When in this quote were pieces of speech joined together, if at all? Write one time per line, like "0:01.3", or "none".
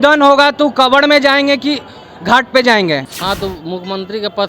0:03.1